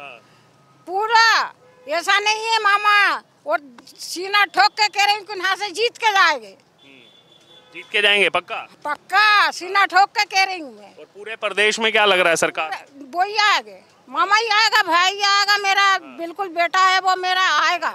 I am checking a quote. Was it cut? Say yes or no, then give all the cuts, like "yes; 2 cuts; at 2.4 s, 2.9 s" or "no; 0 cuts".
no; 0 cuts